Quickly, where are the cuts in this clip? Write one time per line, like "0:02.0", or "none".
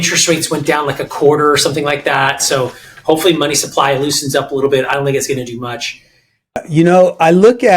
0:06.6